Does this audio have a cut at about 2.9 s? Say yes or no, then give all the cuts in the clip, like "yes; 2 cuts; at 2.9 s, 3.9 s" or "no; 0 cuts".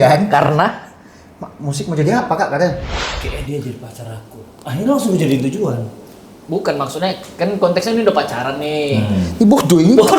yes; 1 cut; at 2.9 s